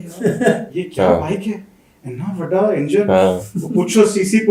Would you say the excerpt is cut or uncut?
uncut